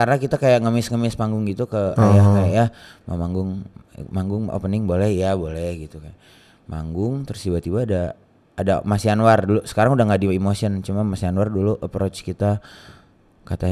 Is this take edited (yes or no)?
no